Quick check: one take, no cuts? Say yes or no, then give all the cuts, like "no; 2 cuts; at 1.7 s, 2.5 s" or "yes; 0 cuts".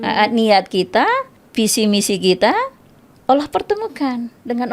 no; 1 cut; at 1.4 s